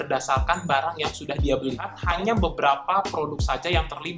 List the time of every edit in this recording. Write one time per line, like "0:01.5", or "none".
0:01.9